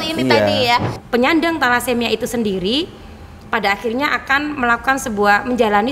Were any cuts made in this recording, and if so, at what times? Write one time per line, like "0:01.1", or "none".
0:00.9